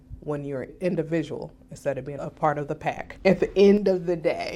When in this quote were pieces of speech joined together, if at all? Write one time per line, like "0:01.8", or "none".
0:00.7
0:02.1
0:03.1